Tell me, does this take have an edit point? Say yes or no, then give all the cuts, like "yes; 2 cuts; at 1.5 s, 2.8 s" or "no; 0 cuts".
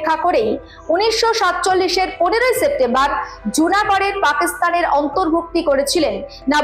no; 0 cuts